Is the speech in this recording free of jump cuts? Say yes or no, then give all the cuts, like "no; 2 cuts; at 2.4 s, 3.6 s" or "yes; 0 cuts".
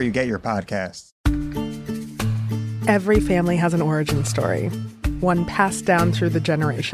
no; 1 cut; at 1.1 s